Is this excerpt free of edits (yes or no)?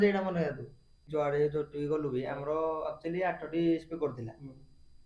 no